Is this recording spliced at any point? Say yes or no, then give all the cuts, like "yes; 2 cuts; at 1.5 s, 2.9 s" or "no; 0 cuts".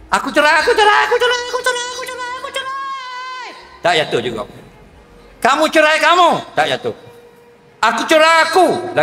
no; 0 cuts